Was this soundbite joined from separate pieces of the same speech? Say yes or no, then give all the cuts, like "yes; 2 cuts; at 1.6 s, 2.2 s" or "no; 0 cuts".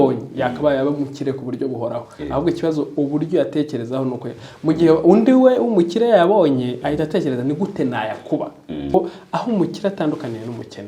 yes; 1 cut; at 8.9 s